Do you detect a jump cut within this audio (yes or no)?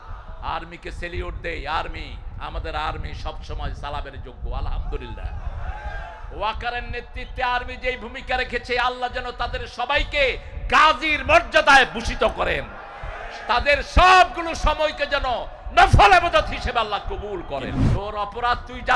yes